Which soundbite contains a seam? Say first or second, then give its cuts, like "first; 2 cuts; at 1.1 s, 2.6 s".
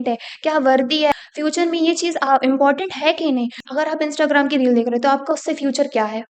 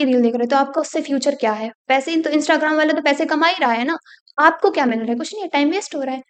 first; 2 cuts; at 1.1 s, 3.6 s